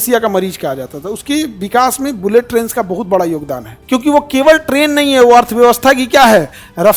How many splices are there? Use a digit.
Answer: 1